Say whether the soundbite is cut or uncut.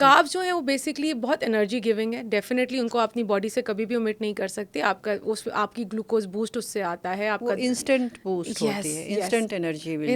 uncut